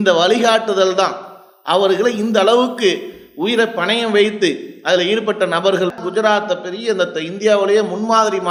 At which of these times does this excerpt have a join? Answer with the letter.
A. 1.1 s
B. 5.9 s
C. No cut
B